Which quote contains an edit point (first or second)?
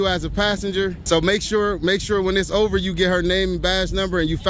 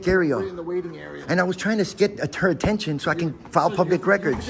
first